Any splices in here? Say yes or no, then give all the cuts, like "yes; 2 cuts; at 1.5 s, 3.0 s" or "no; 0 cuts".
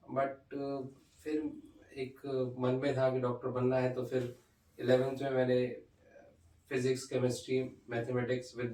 no; 0 cuts